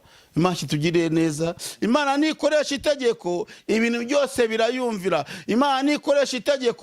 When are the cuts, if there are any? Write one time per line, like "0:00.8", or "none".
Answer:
0:01.7